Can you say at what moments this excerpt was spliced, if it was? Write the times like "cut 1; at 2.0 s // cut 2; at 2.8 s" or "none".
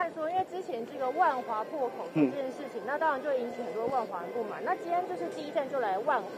none